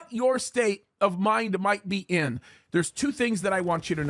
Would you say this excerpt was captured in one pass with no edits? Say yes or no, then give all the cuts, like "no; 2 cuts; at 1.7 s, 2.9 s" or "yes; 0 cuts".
yes; 0 cuts